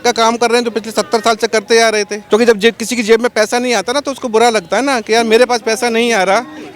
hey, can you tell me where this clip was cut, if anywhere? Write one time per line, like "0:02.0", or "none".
0:02.2